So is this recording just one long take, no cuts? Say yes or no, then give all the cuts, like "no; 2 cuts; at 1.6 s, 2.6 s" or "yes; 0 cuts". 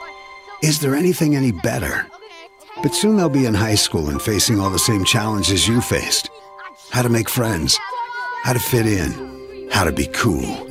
yes; 0 cuts